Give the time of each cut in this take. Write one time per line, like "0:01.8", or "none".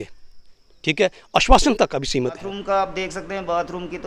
0:02.5